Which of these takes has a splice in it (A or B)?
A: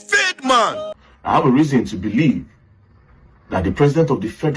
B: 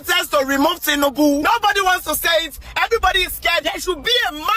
A